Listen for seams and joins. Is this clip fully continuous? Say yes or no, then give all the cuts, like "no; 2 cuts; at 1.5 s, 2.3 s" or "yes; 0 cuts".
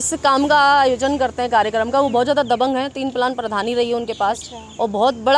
yes; 0 cuts